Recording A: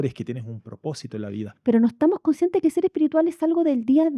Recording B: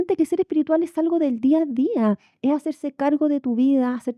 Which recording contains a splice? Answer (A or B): A